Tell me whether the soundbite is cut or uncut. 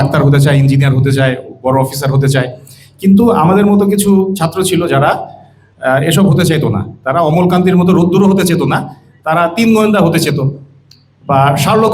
uncut